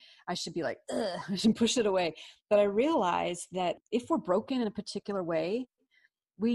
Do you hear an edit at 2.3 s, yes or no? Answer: no